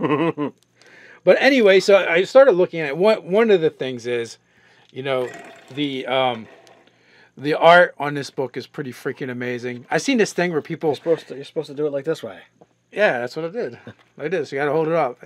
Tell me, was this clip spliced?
yes; 1 cut; at 11.4 s

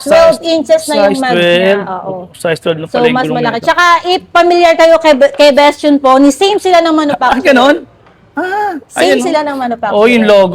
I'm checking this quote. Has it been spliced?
no; 0 cuts

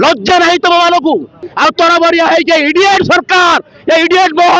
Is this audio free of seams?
no; 1 cut; at 1.4 s

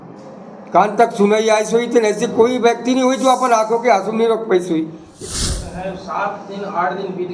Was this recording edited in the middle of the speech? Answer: yes; 1 cut; at 5.2 s

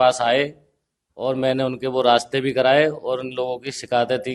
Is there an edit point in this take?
no; 0 cuts

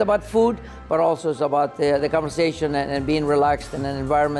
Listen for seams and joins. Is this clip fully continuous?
yes; 0 cuts

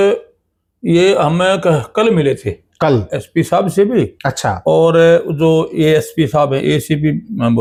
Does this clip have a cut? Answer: no; 0 cuts

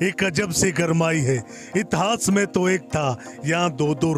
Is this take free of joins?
yes; 0 cuts

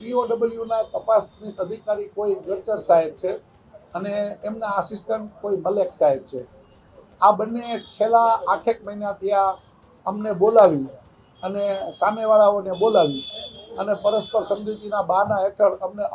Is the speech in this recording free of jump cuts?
yes; 0 cuts

